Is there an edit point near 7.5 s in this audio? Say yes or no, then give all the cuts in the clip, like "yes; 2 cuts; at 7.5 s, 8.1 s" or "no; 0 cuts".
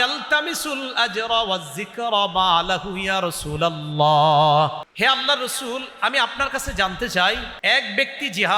yes; 2 cuts; at 4.8 s, 7.5 s